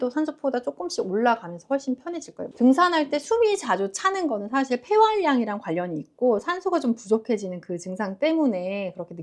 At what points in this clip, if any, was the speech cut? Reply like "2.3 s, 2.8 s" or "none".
2.4 s